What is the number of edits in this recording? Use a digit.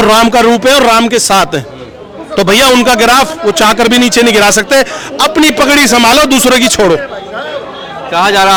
0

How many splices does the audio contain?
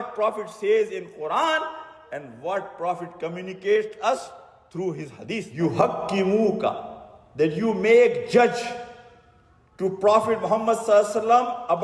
1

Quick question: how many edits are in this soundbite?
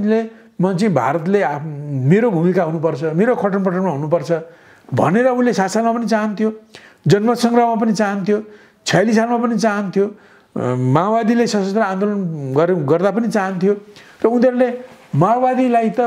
0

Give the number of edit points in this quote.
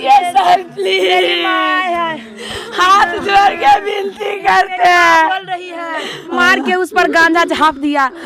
1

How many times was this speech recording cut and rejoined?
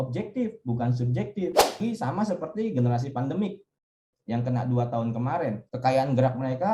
2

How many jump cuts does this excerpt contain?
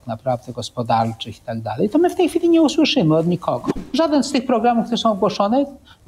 1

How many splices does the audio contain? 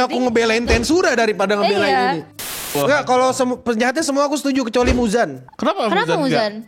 2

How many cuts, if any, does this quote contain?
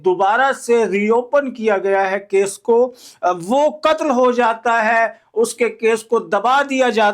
1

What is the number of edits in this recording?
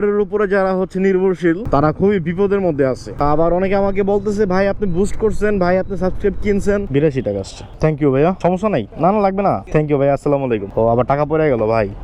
4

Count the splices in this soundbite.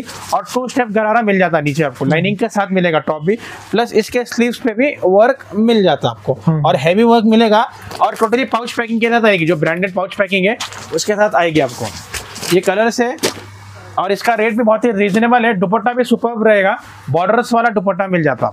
0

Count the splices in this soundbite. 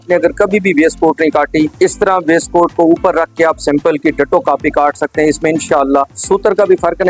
2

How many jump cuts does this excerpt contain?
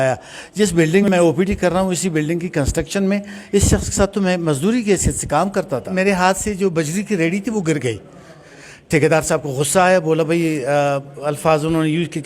2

